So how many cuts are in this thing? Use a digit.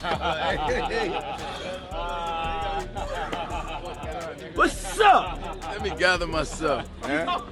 0